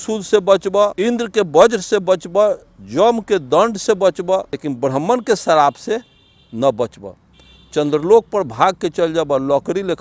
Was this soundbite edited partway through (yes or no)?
yes